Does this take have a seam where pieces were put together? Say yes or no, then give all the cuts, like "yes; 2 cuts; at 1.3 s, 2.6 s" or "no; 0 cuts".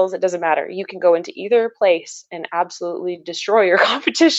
no; 0 cuts